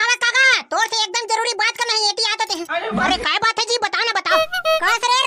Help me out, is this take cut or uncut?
cut